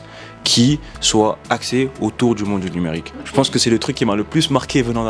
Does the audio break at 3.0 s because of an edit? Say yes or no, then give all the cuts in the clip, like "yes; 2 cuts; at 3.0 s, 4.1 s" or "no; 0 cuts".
yes; 1 cut; at 3.0 s